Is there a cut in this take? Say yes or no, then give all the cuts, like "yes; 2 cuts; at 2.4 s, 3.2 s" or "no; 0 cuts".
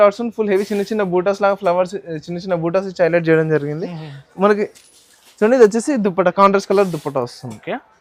no; 0 cuts